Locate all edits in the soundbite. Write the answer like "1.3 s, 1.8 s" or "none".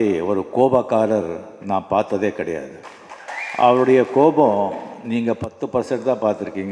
3.4 s